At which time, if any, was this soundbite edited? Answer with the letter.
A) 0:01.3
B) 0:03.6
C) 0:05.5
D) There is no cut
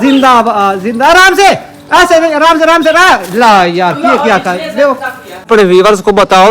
C